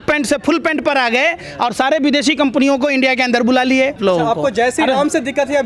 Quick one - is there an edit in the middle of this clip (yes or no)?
yes